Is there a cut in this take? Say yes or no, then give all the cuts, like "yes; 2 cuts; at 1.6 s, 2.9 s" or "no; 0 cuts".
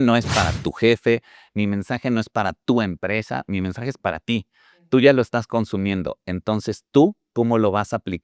no; 0 cuts